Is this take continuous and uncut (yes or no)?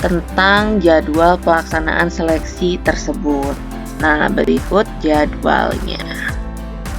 no